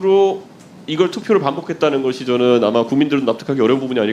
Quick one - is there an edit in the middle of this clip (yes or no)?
no